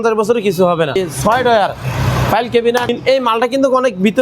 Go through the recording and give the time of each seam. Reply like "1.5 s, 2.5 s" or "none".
1.0 s, 2.9 s